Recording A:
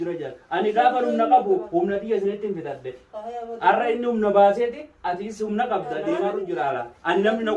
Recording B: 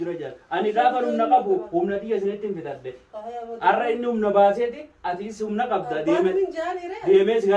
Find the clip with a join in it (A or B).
A